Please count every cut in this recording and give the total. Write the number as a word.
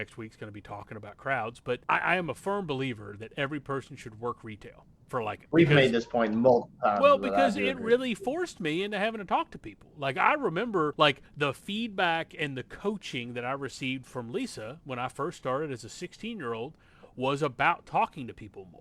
three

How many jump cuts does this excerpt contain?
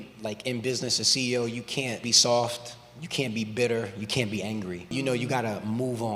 two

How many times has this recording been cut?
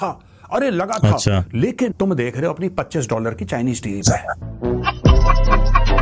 one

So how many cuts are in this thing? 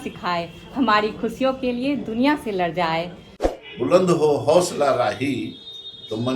one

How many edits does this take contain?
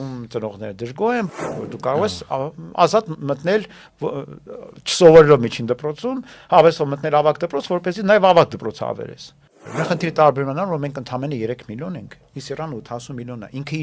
two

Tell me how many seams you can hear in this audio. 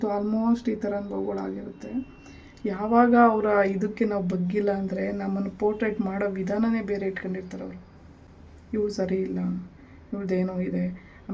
zero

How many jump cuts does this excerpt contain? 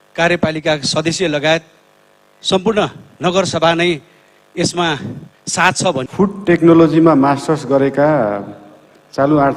one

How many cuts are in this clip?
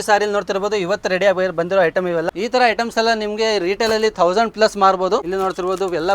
two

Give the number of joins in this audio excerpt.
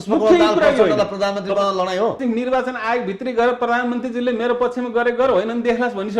one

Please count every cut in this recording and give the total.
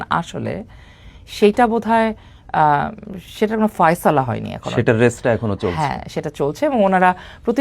zero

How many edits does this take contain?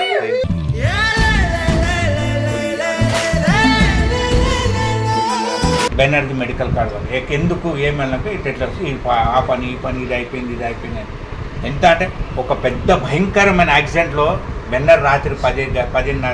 one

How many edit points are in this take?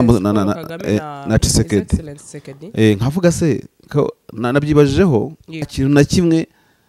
one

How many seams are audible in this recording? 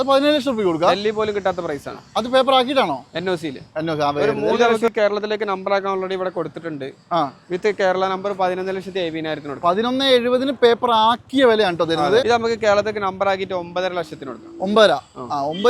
two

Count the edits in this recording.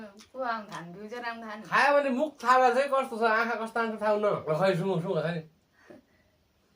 two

